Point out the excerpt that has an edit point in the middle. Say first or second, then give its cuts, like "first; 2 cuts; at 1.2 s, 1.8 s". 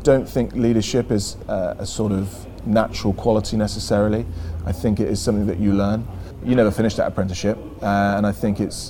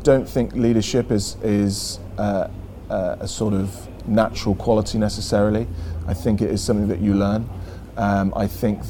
first; 2 cuts; at 1.3 s, 6.4 s